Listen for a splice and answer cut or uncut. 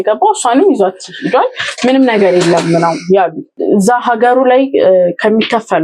cut